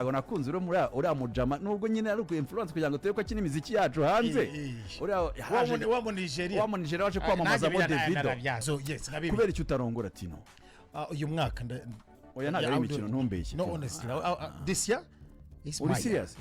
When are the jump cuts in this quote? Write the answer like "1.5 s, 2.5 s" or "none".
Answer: 8.6 s

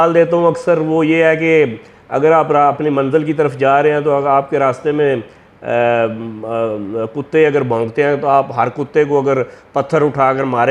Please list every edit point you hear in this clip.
none

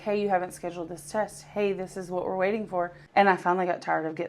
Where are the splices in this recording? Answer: 3.0 s

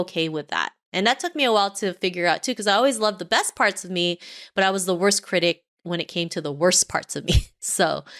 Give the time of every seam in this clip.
none

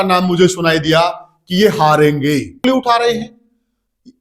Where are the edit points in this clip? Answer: 2.6 s

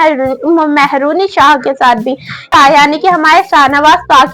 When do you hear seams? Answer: 2.4 s

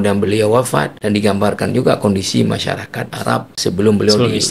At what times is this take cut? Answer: 0.9 s, 3.6 s

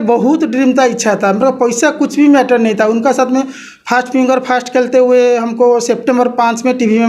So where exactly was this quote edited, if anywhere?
none

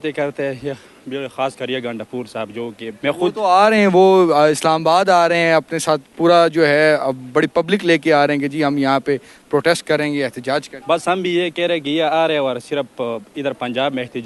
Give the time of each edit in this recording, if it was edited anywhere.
2.9 s, 10.7 s

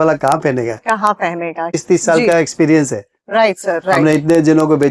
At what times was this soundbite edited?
1.8 s

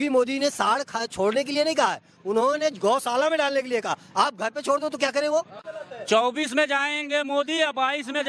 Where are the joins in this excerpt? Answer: 5.6 s

